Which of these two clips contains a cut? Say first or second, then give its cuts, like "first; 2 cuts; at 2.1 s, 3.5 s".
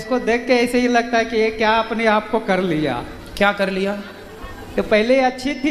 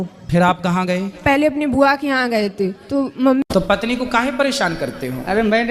second; 1 cut; at 3.5 s